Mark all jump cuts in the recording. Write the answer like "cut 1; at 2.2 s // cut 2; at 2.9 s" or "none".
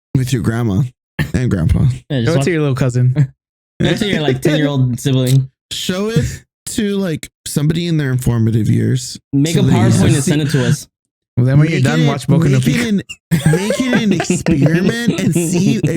cut 1; at 7.3 s

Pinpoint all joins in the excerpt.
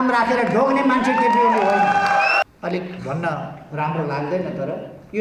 cut 1; at 2.4 s

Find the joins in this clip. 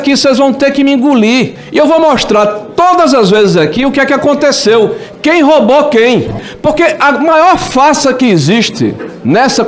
cut 1; at 1.6 s // cut 2; at 6.4 s

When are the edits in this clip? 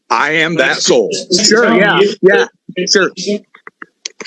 cut 1; at 1.4 s

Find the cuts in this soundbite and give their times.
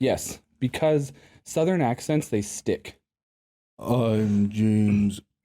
cut 1; at 3.8 s

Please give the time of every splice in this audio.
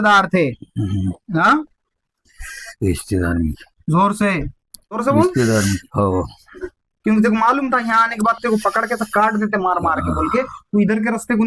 cut 1; at 5.9 s

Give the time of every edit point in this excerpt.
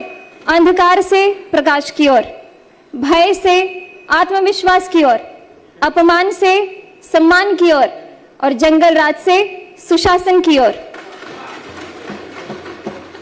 none

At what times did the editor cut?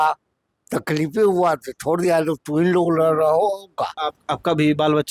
cut 1; at 4.1 s

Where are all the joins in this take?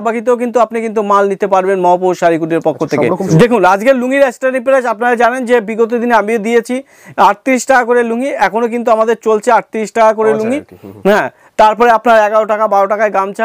cut 1; at 3.2 s

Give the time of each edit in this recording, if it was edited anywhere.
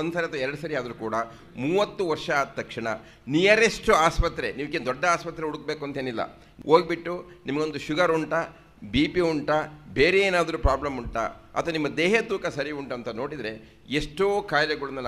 cut 1; at 6.4 s

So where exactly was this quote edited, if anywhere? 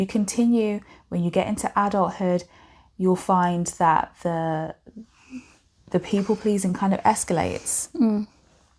none

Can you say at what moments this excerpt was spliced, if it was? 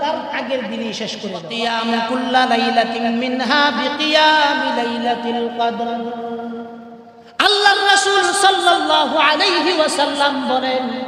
cut 1; at 1.5 s

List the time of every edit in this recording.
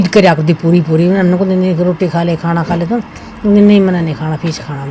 none

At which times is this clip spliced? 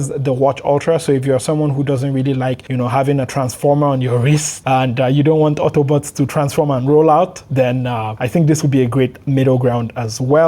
cut 1; at 2.6 s // cut 2; at 4.5 s // cut 3; at 8.2 s

